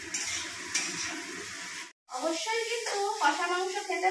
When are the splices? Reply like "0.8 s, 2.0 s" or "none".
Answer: 1.9 s